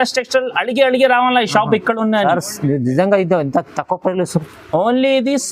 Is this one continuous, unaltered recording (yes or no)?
yes